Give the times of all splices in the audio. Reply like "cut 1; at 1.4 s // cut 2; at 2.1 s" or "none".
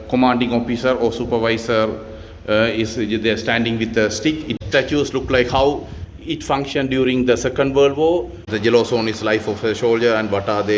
cut 1; at 4.6 s // cut 2; at 8.5 s